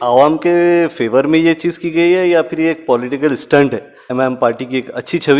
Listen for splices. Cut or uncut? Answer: cut